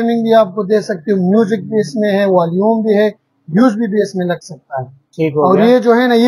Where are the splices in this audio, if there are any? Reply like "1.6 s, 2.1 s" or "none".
none